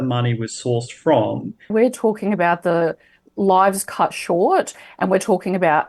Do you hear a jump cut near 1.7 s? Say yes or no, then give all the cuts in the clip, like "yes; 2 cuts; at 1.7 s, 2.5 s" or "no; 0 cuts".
yes; 1 cut; at 1.7 s